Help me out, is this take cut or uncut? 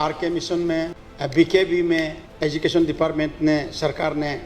cut